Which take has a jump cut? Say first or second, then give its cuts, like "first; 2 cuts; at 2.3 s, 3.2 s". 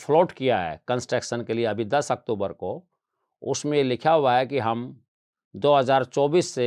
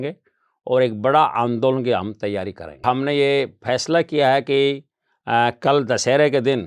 second; 1 cut; at 2.8 s